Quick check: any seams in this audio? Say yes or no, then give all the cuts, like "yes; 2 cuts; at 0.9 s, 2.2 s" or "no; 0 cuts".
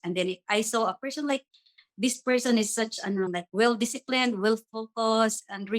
no; 0 cuts